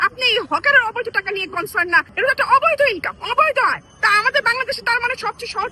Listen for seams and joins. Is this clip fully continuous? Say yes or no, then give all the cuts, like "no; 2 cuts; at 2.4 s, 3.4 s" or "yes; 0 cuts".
no; 1 cut; at 2.1 s